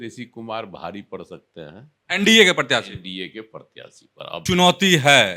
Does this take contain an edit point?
yes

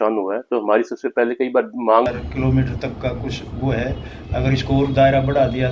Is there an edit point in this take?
yes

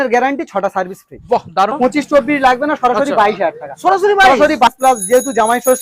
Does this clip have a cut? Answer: yes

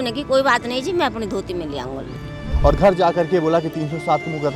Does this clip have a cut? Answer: yes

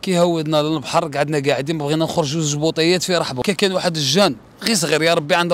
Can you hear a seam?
yes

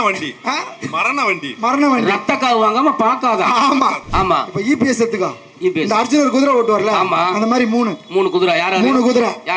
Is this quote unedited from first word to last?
no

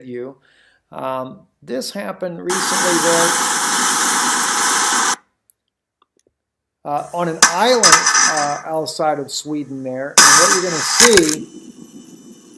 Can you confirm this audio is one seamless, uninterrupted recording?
no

